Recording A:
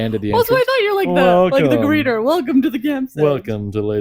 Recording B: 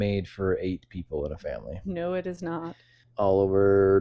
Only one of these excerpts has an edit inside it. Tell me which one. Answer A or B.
B